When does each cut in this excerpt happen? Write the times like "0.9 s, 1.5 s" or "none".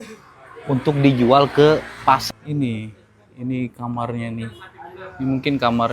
2.2 s